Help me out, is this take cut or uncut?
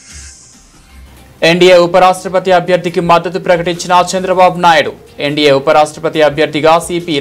cut